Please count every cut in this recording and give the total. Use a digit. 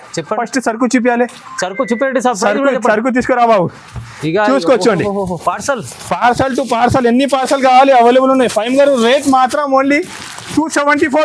0